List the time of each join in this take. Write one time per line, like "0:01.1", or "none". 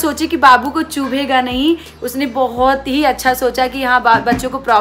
none